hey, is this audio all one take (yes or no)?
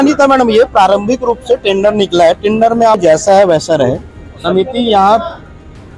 no